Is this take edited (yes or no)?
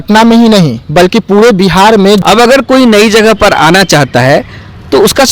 yes